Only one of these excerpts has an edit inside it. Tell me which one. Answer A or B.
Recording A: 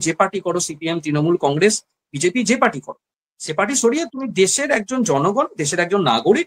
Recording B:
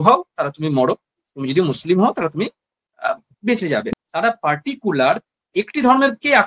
B